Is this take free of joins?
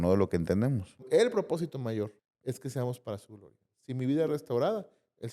no; 2 cuts; at 1.0 s, 2.3 s

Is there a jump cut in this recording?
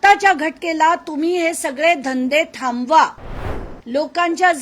no; 0 cuts

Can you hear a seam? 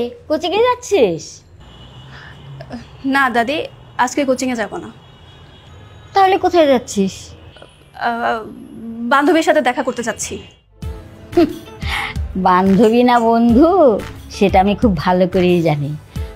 no; 0 cuts

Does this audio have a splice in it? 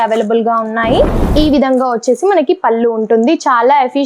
yes; 1 cut; at 1.3 s

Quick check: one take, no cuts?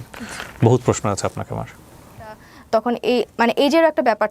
no; 1 cut; at 2.5 s

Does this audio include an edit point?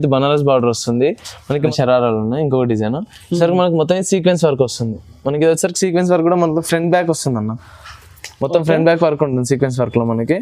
yes; 1 cut; at 1.7 s

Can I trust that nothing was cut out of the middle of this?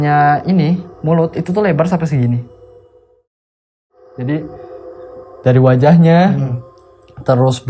no; 1 cut; at 3.6 s

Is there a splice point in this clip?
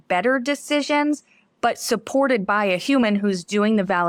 no; 0 cuts

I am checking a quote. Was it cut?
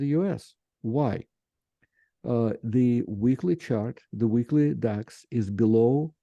no; 0 cuts

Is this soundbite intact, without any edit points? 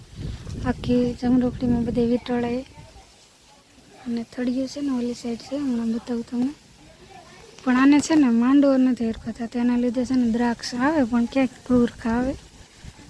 yes; 0 cuts

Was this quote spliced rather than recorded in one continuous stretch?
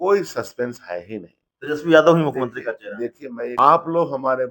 yes; 1 cut; at 3.5 s

